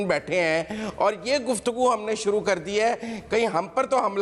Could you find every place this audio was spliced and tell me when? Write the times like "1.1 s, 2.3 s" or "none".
none